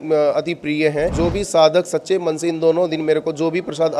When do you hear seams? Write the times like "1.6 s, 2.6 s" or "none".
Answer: 1.1 s

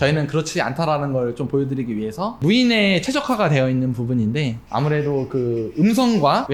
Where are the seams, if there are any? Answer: 2.4 s

